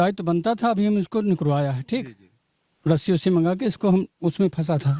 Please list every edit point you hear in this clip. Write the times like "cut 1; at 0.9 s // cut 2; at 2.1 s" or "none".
none